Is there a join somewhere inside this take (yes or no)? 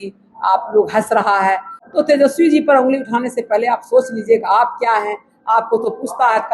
yes